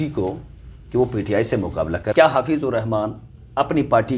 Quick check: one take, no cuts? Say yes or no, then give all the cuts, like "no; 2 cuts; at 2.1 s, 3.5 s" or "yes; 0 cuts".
no; 1 cut; at 2.1 s